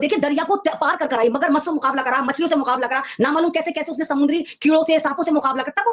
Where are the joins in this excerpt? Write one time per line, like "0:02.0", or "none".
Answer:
none